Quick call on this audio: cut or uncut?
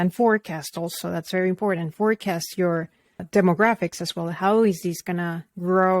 cut